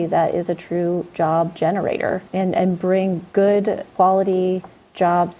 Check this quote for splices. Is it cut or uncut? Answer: cut